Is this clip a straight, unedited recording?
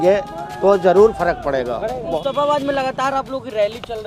no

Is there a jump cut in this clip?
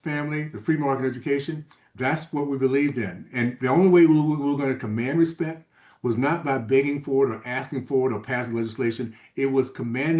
no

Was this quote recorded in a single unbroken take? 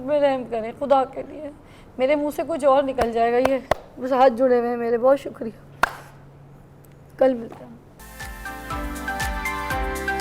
yes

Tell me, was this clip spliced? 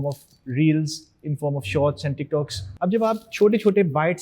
yes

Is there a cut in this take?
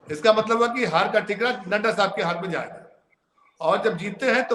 no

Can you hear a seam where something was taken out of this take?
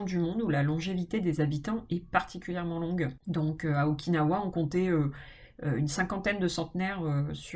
yes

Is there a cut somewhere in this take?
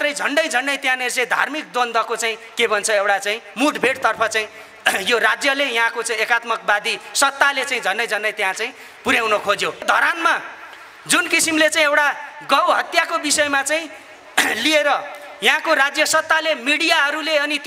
yes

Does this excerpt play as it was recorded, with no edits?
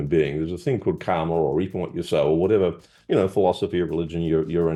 yes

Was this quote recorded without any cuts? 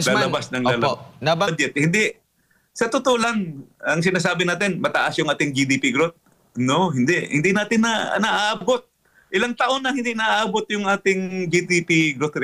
no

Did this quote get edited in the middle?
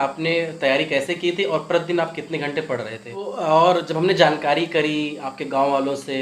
yes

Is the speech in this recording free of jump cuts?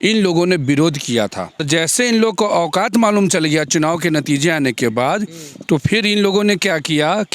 no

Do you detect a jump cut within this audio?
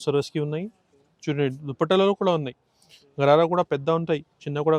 no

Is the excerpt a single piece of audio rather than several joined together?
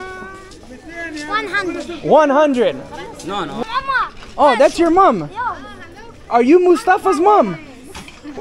no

